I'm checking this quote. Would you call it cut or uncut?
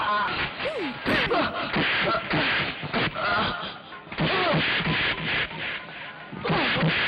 uncut